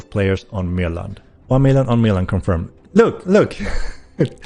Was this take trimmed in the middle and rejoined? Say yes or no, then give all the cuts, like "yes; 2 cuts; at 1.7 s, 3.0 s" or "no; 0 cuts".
yes; 1 cut; at 1.3 s